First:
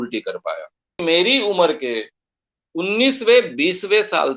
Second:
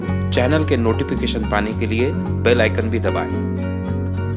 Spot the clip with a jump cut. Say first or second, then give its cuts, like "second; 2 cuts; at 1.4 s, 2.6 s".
first; 1 cut; at 1.0 s